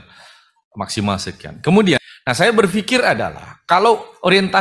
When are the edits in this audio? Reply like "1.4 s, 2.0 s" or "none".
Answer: 2.0 s